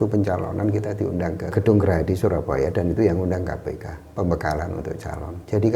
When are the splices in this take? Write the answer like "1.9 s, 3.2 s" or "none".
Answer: 1.5 s

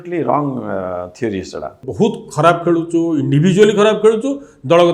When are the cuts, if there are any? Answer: 1.8 s

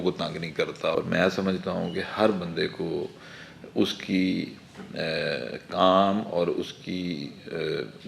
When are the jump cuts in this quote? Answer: 0.9 s

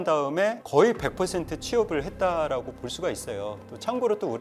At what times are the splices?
none

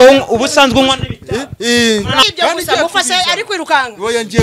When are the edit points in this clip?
2.2 s

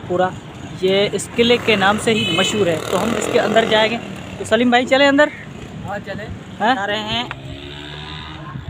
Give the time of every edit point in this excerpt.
6.8 s

